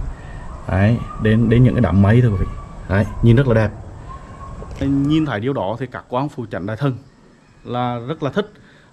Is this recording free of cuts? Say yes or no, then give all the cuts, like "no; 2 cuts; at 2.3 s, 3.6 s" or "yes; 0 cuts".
no; 1 cut; at 4.8 s